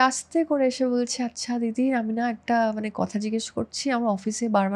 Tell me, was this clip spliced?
no; 0 cuts

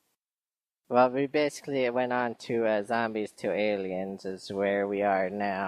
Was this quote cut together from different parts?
yes; 1 cut; at 2.2 s

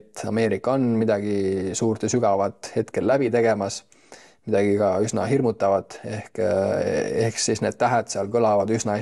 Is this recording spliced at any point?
no; 0 cuts

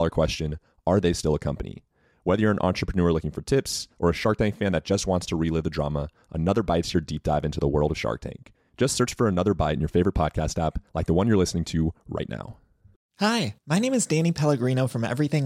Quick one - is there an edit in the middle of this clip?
yes; 1 cut; at 13.1 s

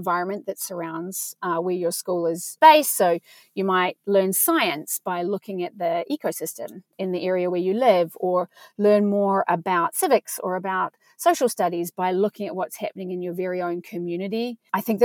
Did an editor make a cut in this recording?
yes; 2 cuts; at 2.5 s, 6.9 s

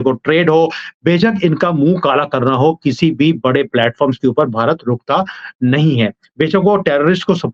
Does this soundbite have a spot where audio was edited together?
no; 0 cuts

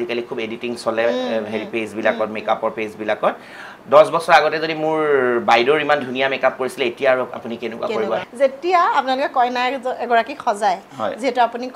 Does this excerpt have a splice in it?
yes; 1 cut; at 8.3 s

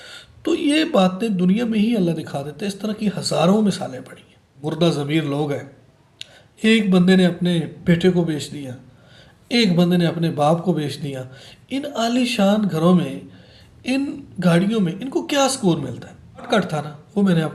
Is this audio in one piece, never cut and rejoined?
no; 2 cuts; at 4.6 s, 16.5 s

